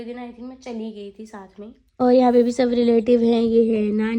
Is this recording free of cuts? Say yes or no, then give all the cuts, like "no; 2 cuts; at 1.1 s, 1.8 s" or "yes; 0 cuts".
no; 1 cut; at 2.0 s